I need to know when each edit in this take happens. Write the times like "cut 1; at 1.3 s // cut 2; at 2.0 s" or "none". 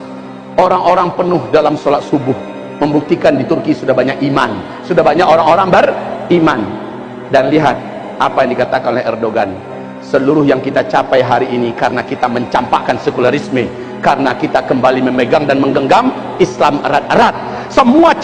none

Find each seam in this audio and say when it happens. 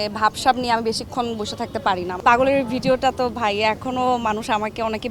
cut 1; at 2.2 s

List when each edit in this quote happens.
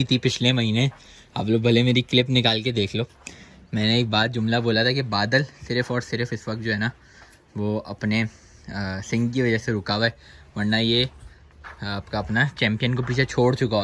none

